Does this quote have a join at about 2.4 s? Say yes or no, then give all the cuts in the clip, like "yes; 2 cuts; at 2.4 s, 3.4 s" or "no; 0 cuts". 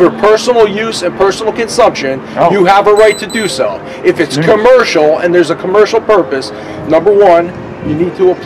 no; 0 cuts